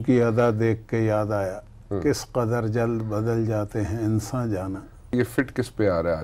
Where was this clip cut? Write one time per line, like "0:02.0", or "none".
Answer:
0:05.1